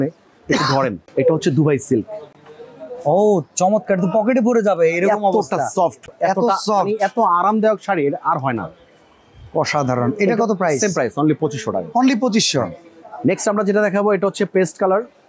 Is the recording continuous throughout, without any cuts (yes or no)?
yes